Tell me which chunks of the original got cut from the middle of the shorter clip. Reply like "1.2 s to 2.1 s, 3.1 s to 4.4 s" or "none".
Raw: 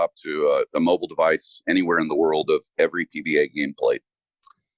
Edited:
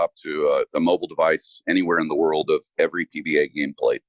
none